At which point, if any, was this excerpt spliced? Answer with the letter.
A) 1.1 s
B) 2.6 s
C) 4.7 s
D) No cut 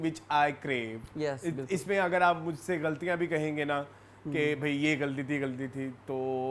D